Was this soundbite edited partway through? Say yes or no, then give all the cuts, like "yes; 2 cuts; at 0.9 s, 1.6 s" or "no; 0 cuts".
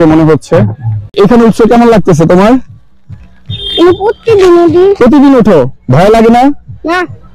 yes; 1 cut; at 1.1 s